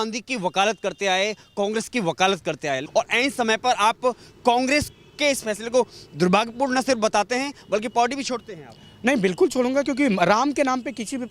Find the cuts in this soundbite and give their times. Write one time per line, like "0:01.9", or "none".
0:02.8